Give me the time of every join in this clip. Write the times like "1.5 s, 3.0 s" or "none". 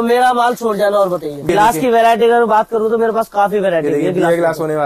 1.5 s